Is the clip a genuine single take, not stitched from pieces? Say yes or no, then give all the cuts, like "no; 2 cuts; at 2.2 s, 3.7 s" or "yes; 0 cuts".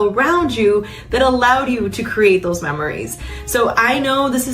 yes; 0 cuts